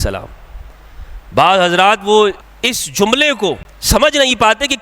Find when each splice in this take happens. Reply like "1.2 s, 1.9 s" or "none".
2.5 s, 3.7 s